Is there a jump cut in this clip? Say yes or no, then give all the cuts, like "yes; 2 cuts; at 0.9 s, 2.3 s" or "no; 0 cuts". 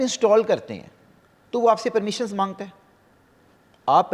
no; 0 cuts